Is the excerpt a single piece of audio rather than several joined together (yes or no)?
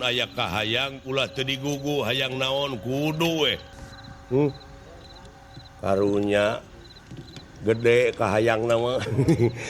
no